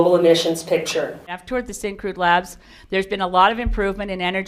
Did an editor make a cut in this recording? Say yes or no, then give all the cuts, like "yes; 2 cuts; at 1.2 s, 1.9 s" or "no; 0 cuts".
yes; 1 cut; at 1.2 s